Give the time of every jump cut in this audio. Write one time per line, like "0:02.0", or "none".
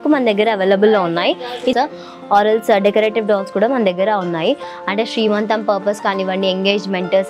0:01.7